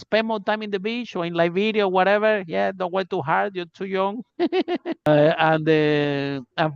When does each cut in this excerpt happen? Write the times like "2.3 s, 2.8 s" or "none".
5.1 s